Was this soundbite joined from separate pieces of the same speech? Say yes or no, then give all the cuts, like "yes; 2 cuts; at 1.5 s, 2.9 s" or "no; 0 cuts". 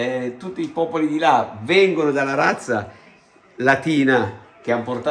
no; 0 cuts